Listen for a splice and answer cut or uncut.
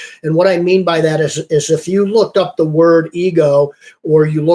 uncut